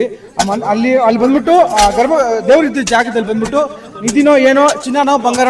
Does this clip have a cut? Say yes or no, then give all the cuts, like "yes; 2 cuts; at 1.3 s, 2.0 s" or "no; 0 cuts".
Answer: no; 0 cuts